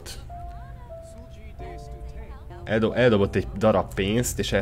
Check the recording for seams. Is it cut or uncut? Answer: cut